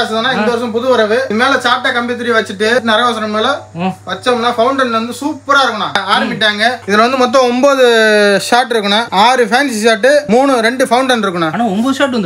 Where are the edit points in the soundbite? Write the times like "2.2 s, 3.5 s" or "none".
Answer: 1.3 s, 2.8 s, 5.9 s